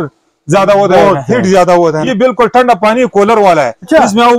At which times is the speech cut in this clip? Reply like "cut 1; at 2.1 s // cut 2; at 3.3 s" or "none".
cut 1; at 2.0 s